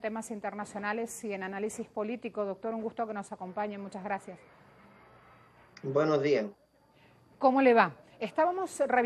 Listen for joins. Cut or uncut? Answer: uncut